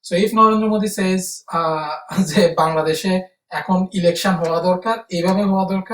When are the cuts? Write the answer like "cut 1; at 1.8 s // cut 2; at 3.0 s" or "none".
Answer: none

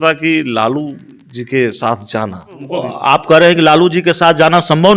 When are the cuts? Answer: cut 1; at 2.6 s

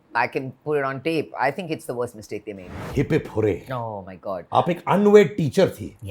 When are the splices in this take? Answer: cut 1; at 2.8 s

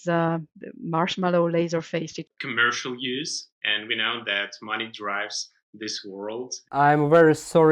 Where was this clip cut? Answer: cut 1; at 2.3 s // cut 2; at 6.6 s

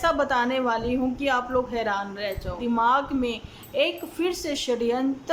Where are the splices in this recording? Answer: cut 1; at 2.6 s

